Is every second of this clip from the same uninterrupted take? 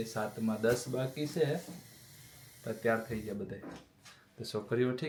yes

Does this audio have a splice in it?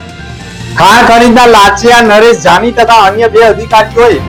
no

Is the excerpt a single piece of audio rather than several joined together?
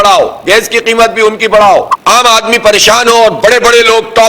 no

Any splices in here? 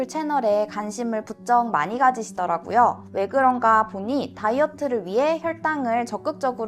no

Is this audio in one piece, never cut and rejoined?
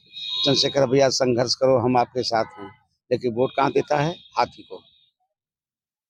yes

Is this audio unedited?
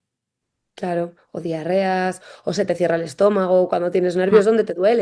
yes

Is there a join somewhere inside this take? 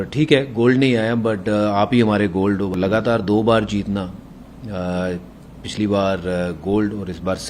yes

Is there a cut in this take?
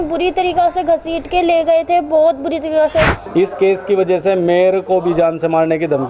yes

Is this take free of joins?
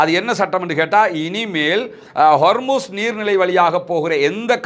yes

